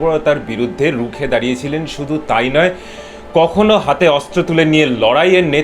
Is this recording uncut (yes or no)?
yes